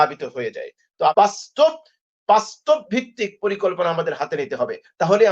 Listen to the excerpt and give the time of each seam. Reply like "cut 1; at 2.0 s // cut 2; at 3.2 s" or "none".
cut 1; at 1.1 s